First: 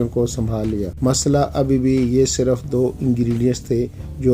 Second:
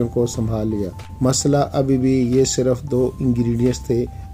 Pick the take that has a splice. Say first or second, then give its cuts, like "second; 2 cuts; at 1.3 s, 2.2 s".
first; 1 cut; at 0.9 s